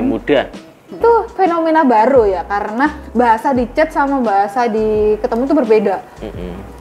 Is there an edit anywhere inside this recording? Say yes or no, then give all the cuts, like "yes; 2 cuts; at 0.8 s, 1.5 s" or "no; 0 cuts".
yes; 1 cut; at 1.0 s